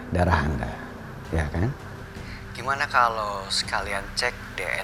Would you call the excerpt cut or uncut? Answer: uncut